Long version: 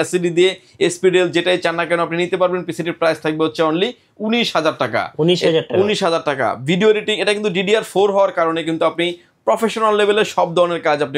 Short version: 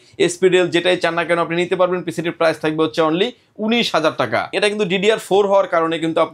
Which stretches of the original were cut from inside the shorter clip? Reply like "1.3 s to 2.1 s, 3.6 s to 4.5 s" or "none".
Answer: 5.1 s to 7.1 s